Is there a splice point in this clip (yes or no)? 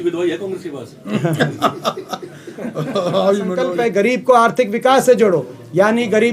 yes